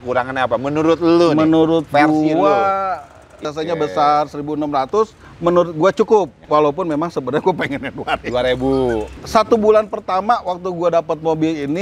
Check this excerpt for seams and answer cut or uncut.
cut